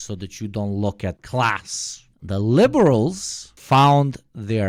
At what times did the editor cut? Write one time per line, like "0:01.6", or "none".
0:01.2